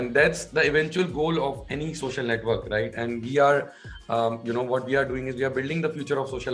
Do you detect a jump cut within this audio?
no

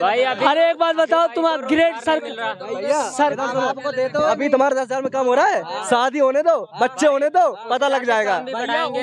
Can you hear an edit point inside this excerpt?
no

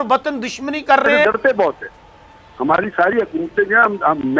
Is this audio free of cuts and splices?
no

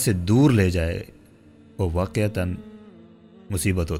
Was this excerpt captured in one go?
yes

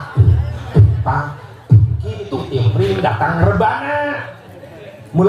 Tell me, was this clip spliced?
yes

